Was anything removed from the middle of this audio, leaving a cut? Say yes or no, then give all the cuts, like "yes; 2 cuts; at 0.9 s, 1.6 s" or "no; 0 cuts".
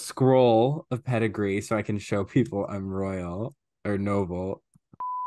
no; 0 cuts